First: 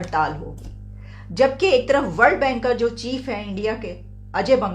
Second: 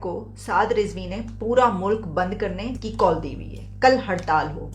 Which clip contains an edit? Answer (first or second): second